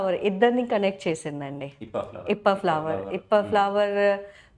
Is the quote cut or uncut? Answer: uncut